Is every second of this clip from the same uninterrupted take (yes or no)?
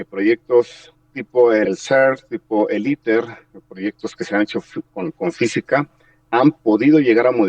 no